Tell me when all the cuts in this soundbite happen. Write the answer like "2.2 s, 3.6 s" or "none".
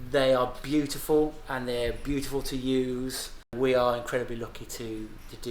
3.5 s